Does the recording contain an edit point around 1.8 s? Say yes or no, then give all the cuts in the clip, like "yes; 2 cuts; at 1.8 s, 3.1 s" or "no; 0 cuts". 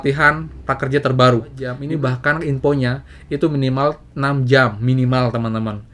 yes; 1 cut; at 1.8 s